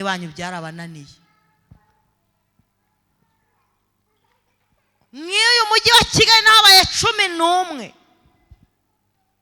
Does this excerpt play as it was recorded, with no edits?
yes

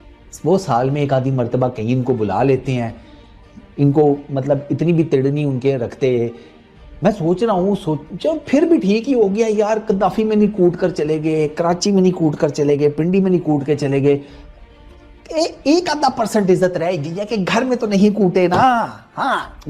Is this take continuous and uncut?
yes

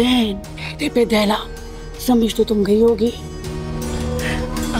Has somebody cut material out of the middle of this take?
no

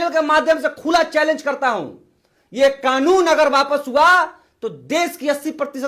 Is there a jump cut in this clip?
no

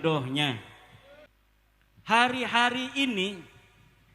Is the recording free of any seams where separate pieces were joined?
no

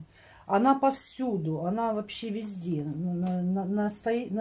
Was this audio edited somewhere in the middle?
no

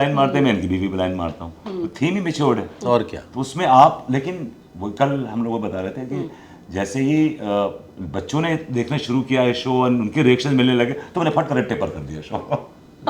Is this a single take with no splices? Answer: yes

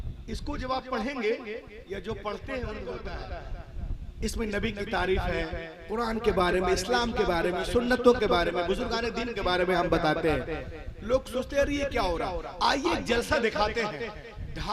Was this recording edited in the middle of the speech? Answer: yes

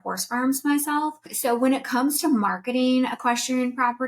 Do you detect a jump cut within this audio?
yes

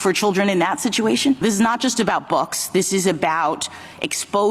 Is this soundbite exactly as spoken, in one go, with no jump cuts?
no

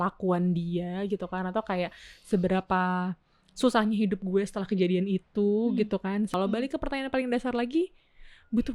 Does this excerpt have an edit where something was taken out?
yes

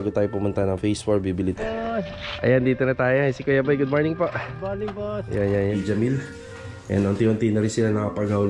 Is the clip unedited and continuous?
no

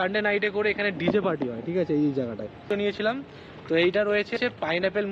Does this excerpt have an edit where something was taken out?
yes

